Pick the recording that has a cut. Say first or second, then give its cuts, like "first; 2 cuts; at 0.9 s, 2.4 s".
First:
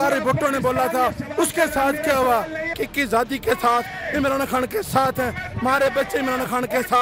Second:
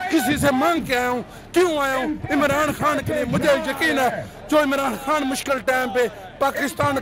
first; 1 cut; at 2.7 s